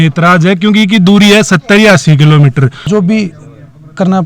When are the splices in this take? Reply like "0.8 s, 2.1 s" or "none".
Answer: 2.8 s